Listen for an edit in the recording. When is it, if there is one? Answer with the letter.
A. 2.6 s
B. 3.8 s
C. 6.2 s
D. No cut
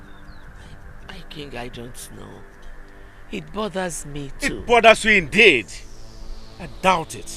D